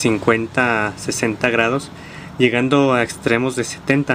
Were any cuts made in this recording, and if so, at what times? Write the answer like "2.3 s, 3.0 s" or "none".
1.2 s